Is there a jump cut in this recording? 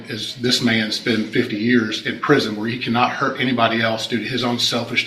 no; 0 cuts

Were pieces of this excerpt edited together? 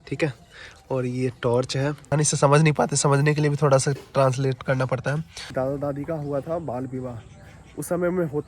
yes; 2 cuts; at 2.1 s, 5.5 s

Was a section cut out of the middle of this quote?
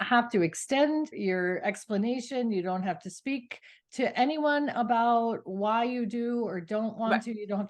yes; 1 cut; at 1.1 s

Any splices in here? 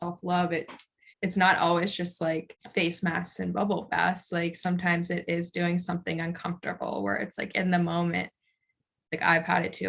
yes; 2 cuts; at 1.1 s, 2.6 s

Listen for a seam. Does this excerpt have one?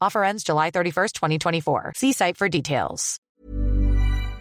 yes; 1 cut; at 3.3 s

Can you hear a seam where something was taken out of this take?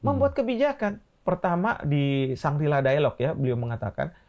yes; 1 cut; at 1.1 s

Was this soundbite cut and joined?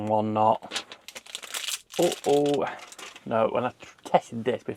no; 0 cuts

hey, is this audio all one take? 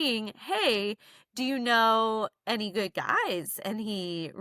yes; 0 cuts

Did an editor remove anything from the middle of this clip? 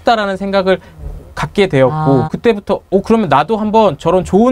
yes; 1 cut; at 2.3 s

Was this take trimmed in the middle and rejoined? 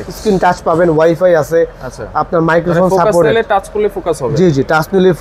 no; 0 cuts

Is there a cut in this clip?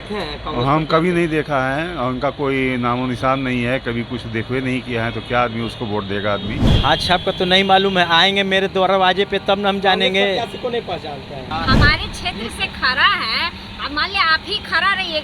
yes; 2 cuts; at 6.7 s, 11.5 s

